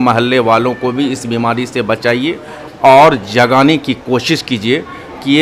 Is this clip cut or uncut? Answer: uncut